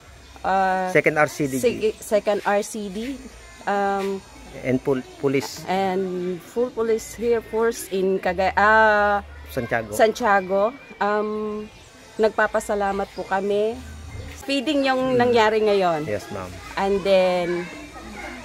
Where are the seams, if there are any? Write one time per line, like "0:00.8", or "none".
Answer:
0:14.4